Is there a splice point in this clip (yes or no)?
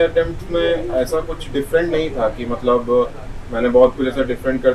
no